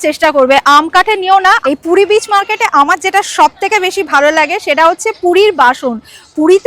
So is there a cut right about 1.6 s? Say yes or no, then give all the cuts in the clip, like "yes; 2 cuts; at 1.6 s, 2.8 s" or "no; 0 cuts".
yes; 1 cut; at 1.6 s